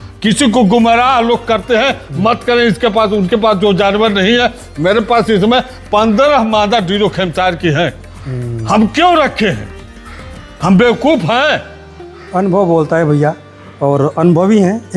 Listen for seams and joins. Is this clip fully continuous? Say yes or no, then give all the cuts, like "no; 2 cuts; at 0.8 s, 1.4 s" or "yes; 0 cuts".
yes; 0 cuts